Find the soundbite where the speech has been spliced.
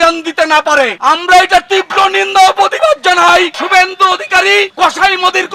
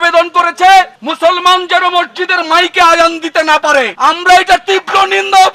first; 1 cut; at 3.6 s

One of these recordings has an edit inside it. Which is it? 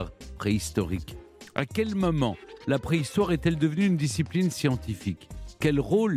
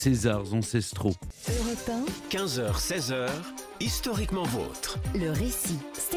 second; 1 cut; at 1.3 s

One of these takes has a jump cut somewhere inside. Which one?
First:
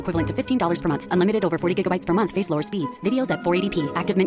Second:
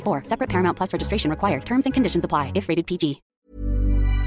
second; 1 cut; at 3.3 s

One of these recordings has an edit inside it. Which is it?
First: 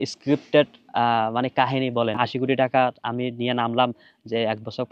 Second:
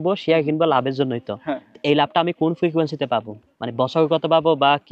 first; 1 cut; at 2.2 s

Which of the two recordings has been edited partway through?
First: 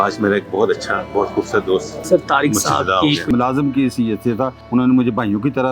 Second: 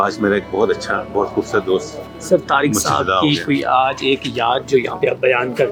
first; 3 cuts; at 1.9 s, 3.3 s, 4.6 s

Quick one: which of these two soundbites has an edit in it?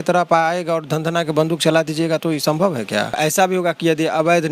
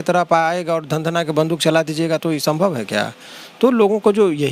first; 1 cut; at 3.2 s

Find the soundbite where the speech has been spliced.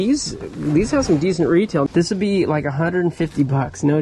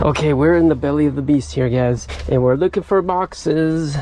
first; 1 cut; at 1.9 s

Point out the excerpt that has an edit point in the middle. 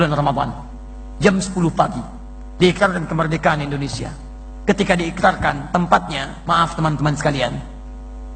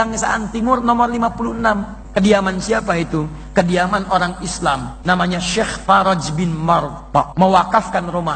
second; 3 cuts; at 2.0 s, 4.9 s, 7.3 s

